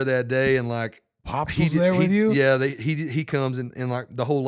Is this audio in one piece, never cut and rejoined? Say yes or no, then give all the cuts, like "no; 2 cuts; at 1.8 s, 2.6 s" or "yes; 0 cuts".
yes; 0 cuts